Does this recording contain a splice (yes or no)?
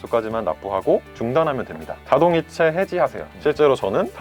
no